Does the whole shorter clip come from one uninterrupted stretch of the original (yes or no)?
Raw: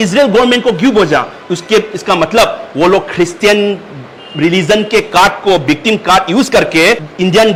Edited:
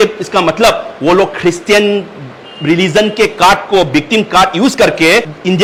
yes